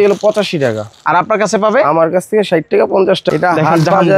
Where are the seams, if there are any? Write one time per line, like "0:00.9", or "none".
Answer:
0:03.2